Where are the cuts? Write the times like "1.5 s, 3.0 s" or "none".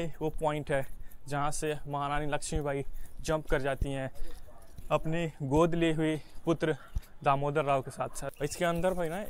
8.2 s